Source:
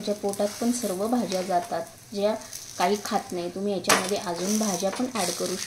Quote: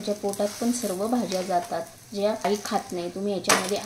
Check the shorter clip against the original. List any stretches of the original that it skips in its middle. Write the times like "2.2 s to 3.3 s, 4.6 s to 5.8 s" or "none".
2.4 s to 2.9 s